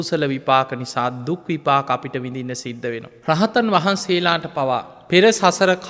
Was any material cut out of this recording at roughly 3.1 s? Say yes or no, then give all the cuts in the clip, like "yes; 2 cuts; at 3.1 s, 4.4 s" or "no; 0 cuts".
yes; 2 cuts; at 3.1 s, 4.9 s